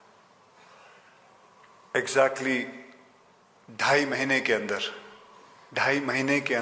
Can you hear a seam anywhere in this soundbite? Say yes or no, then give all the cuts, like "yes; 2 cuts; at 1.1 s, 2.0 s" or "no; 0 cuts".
yes; 1 cut; at 4.6 s